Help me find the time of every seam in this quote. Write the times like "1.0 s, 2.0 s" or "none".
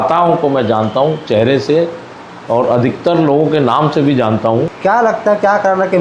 4.7 s